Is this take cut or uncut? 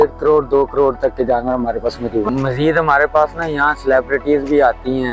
cut